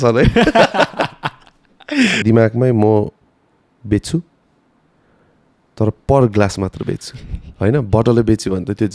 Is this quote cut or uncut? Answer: cut